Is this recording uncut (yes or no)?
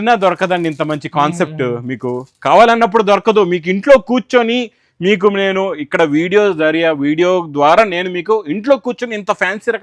yes